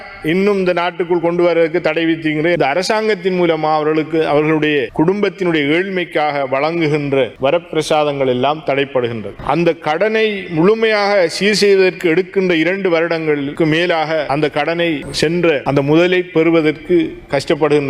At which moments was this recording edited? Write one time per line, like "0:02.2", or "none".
0:02.6